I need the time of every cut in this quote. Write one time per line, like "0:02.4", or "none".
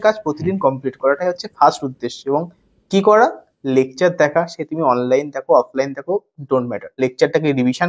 0:06.9